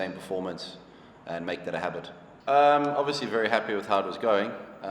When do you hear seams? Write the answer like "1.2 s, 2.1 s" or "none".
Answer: 2.3 s